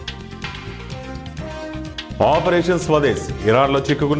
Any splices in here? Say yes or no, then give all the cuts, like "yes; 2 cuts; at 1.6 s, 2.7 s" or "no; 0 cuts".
no; 0 cuts